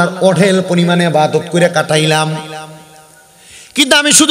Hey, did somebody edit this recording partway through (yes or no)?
no